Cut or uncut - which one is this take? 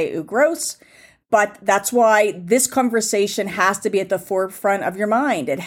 uncut